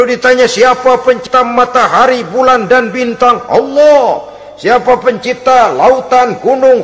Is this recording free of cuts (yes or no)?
no